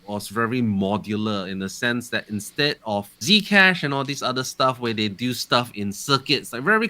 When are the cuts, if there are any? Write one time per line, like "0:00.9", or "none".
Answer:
0:03.1